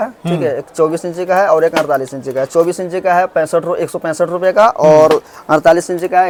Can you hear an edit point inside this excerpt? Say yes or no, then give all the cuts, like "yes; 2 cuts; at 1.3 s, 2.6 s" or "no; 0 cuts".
no; 0 cuts